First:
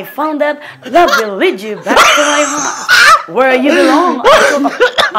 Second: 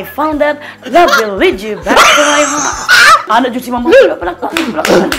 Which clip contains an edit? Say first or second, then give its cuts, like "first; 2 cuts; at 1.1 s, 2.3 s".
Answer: second; 1 cut; at 3.3 s